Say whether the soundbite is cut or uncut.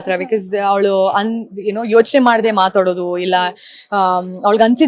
uncut